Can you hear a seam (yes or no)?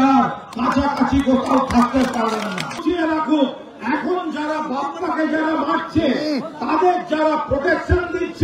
yes